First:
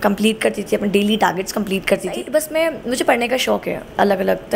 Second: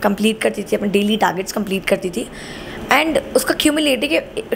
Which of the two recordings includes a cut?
first; 1 cut; at 2.2 s

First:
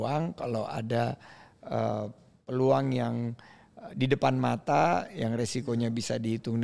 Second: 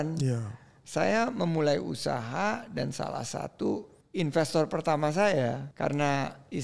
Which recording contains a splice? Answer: second; 2 cuts; at 4.0 s, 5.7 s

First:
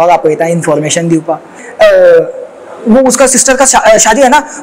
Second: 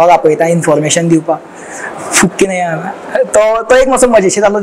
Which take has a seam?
first; 1 cut; at 1.6 s

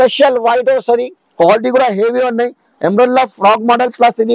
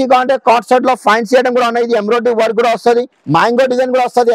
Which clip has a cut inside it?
second; 1 cut; at 3.1 s

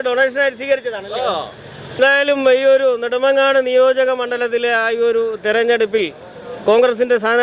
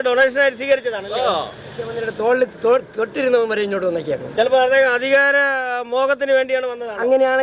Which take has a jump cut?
second; 1 cut; at 1.9 s

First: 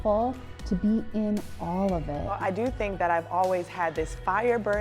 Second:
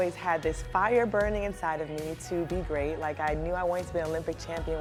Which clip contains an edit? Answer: first; 1 cut; at 2.3 s

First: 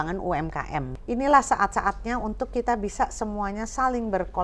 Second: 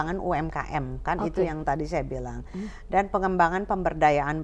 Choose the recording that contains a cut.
first; 1 cut; at 0.9 s

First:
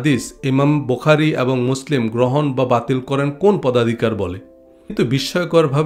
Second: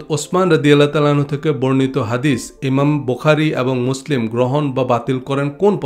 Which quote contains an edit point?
first; 1 cut; at 4.9 s

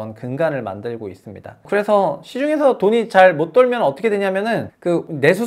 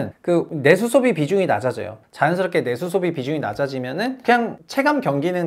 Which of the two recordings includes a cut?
second; 2 cuts; at 2.0 s, 4.2 s

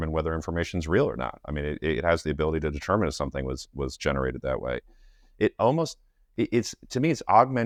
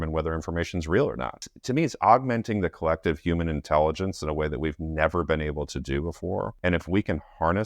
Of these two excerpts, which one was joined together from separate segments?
second; 2 cuts; at 1.5 s, 6.5 s

